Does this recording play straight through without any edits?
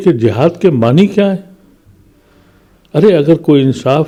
yes; 0 cuts

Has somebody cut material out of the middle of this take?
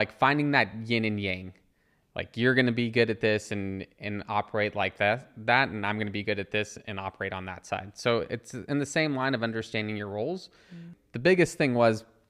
yes; 1 cut; at 10.9 s

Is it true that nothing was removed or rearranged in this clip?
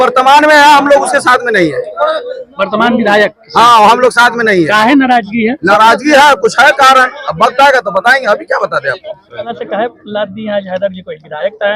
yes; 0 cuts

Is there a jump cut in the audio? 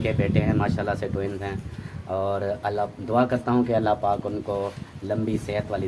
no; 0 cuts

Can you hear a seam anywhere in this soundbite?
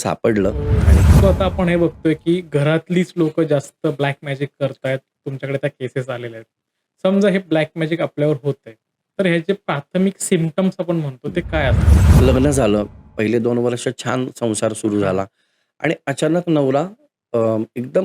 yes; 2 cuts; at 0.9 s, 11.9 s

